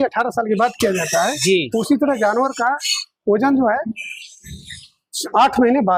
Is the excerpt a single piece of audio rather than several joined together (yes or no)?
yes